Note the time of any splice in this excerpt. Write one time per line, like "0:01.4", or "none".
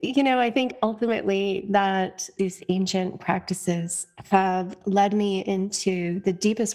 0:02.3

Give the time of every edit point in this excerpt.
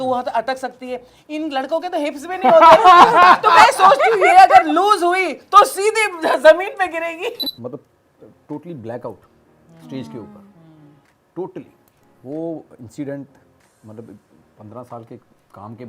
0:07.4

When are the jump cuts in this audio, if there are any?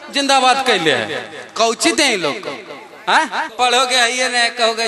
0:03.5

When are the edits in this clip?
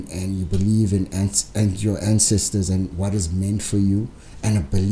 none

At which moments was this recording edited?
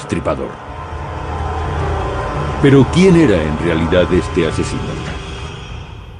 none

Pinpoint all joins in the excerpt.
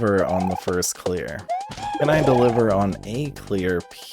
0:01.4

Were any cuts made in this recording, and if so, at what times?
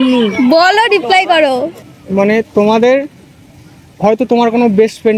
0:01.7

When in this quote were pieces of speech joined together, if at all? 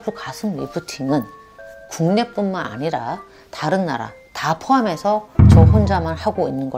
none

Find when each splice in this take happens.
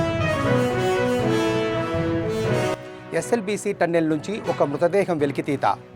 0:02.7

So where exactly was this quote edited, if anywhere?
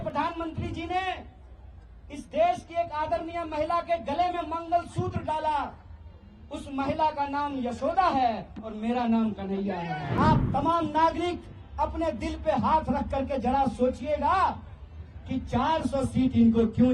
0:10.0

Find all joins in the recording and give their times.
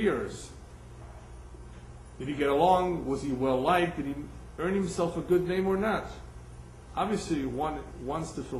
0:05.2

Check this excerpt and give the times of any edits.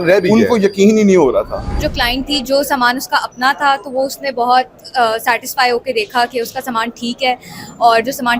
0:01.8

